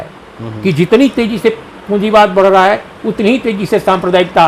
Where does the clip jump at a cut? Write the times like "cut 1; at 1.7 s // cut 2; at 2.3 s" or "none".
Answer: none